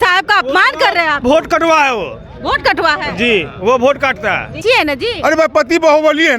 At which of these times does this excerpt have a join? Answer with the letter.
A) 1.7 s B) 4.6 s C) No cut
B